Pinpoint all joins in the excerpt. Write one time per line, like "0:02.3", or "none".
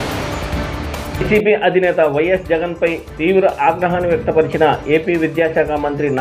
0:01.1